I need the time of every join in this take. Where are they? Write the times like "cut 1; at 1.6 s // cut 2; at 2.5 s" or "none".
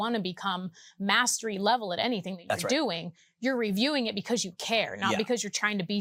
none